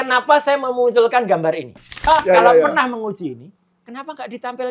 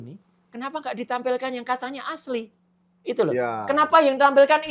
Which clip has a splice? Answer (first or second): first